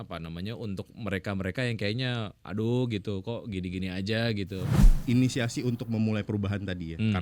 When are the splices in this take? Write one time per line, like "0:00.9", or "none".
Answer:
0:04.8